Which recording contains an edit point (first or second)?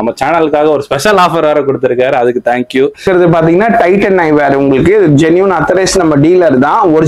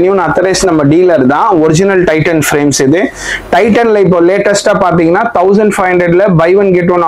first